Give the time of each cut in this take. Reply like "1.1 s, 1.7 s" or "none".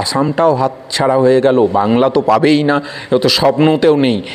none